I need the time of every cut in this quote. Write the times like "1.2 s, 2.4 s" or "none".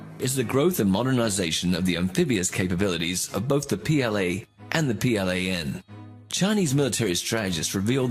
6.2 s